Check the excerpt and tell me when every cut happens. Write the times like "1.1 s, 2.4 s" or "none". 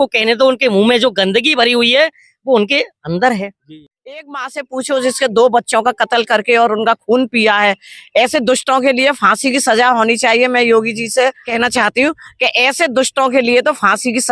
3.7 s, 11.4 s